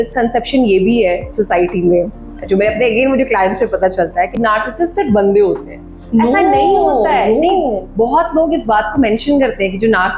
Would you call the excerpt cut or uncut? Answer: uncut